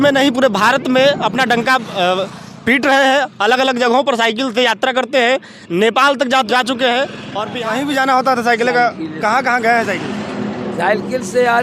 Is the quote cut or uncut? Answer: cut